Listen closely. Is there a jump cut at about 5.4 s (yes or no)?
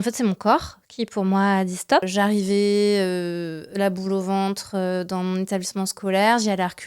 no